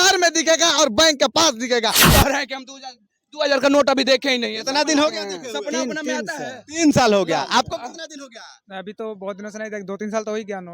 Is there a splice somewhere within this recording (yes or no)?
yes